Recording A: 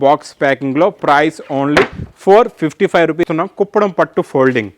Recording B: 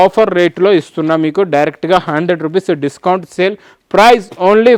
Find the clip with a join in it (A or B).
A